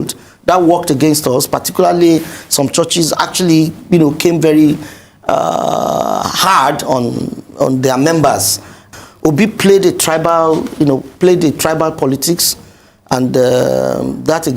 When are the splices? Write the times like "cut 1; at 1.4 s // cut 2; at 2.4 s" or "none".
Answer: cut 1; at 8.8 s